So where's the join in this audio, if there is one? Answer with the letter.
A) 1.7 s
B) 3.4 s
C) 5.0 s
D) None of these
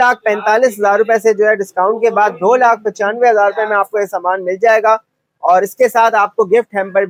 D